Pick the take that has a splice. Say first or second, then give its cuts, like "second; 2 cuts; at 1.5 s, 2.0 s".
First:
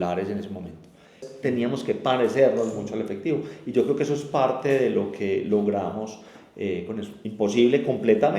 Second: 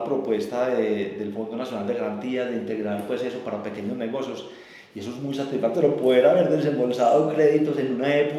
first; 1 cut; at 1.3 s